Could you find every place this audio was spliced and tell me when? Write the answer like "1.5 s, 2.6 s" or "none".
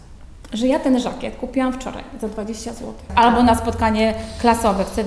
3.1 s